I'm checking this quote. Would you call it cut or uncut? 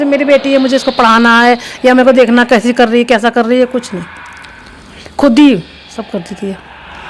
uncut